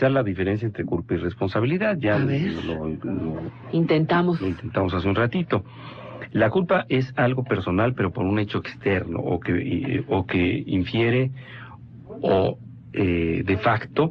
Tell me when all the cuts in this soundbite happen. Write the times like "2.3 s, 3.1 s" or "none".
2.2 s